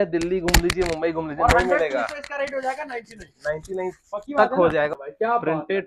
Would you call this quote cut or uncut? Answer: cut